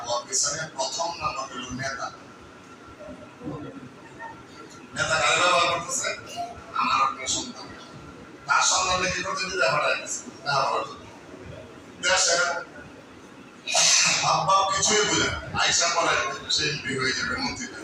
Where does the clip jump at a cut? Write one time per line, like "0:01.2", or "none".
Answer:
none